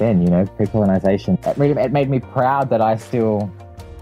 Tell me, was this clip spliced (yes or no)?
yes